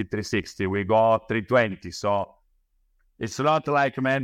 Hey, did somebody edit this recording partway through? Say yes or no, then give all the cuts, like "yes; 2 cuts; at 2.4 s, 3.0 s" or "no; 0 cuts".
no; 0 cuts